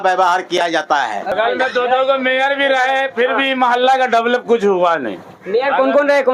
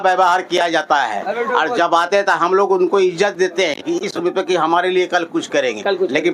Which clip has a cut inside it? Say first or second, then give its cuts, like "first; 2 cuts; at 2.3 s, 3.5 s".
first; 1 cut; at 1.3 s